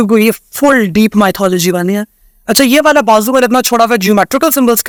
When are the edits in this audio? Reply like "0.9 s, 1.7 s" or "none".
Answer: none